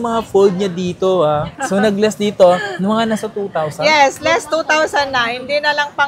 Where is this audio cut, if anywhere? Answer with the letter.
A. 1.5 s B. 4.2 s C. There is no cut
A